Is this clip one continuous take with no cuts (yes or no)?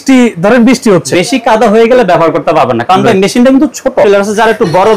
no